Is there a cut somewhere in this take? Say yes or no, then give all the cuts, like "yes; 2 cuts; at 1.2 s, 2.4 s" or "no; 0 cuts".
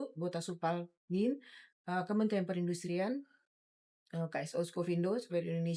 no; 0 cuts